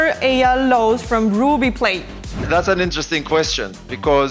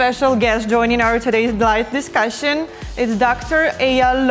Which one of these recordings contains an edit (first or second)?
first